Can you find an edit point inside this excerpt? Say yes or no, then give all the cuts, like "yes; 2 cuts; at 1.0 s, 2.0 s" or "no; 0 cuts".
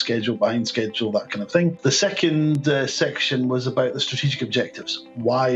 yes; 1 cut; at 1.8 s